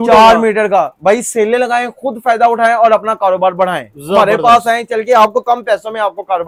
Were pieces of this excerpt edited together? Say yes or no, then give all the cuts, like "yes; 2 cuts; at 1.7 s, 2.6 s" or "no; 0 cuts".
no; 0 cuts